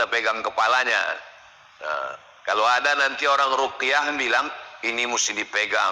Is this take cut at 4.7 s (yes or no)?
no